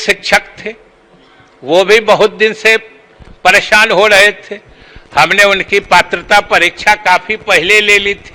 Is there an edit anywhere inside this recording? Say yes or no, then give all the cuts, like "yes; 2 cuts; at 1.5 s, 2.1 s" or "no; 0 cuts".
no; 0 cuts